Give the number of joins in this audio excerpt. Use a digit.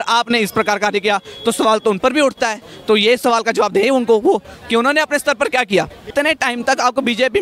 1